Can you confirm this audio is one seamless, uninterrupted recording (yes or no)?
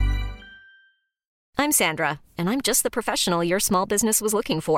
no